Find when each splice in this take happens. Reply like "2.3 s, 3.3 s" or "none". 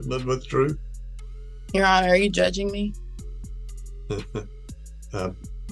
none